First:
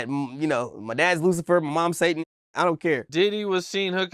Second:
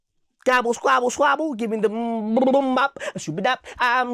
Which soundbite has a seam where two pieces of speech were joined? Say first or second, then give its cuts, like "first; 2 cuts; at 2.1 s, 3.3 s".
first; 1 cut; at 3.1 s